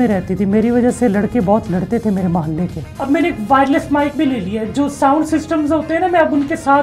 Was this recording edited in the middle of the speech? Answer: yes; 1 cut; at 2.9 s

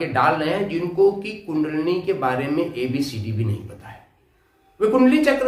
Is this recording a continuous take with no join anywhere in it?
yes; 0 cuts

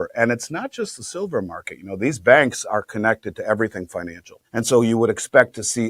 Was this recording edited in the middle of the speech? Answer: no; 0 cuts

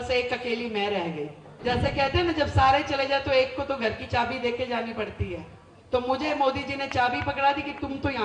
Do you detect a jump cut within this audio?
yes; 1 cut; at 1.4 s

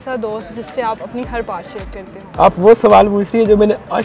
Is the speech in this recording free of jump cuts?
no; 1 cut; at 2.2 s

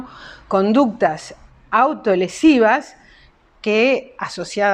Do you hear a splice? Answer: no; 0 cuts

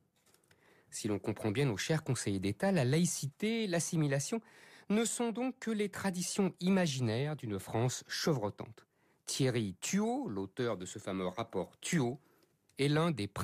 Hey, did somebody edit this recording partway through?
no; 0 cuts

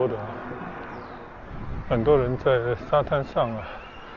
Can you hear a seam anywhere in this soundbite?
yes; 1 cut; at 1.2 s

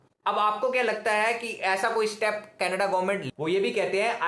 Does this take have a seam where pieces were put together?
yes; 1 cut; at 3.2 s

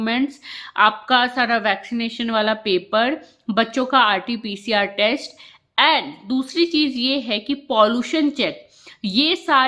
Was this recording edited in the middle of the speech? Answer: no; 0 cuts

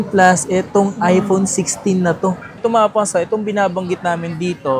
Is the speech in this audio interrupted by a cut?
yes; 1 cut; at 2.5 s

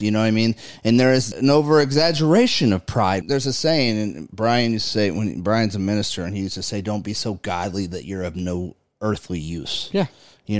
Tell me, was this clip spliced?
yes; 2 cuts; at 1.3 s, 3.2 s

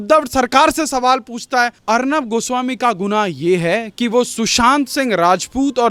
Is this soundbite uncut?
yes; 0 cuts

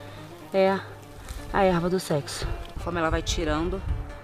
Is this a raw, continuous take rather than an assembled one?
no; 1 cut; at 2.7 s

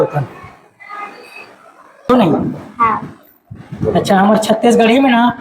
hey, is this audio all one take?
no; 1 cut; at 2.1 s

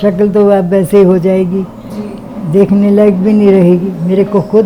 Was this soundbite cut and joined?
no; 0 cuts

